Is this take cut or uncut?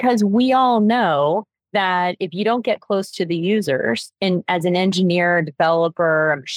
cut